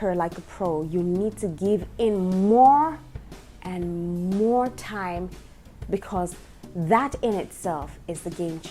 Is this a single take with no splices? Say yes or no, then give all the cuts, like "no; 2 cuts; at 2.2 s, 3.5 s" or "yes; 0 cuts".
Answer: yes; 0 cuts